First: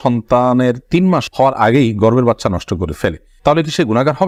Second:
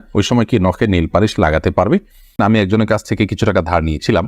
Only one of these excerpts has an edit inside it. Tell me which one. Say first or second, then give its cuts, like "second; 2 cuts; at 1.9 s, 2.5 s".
second; 1 cut; at 2.3 s